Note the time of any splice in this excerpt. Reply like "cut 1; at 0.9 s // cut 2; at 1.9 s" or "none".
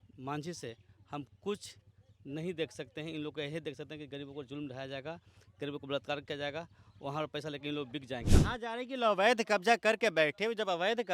cut 1; at 8.3 s

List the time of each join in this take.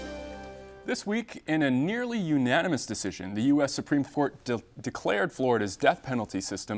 none

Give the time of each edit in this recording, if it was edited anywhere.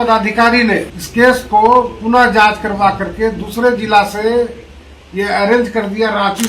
cut 1; at 1.0 s

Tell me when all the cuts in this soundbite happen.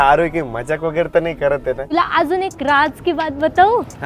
cut 1; at 1.9 s

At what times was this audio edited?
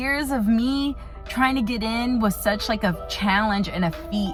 none

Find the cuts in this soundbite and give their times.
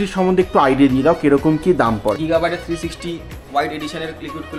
cut 1; at 2.2 s

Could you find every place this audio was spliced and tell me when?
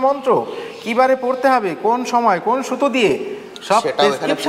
none

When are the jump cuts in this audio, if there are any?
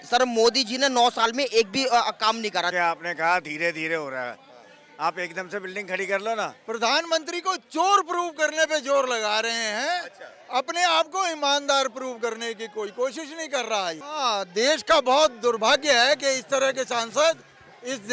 cut 1; at 2.7 s // cut 2; at 6.6 s // cut 3; at 14.0 s

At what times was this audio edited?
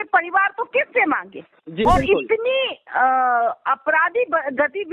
cut 1; at 1.9 s

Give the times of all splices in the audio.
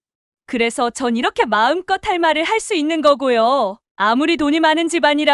cut 1; at 3.8 s

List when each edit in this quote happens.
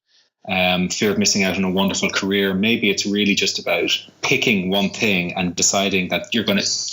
cut 1; at 5.6 s

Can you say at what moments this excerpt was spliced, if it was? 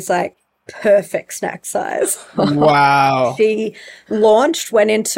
cut 1; at 3.1 s

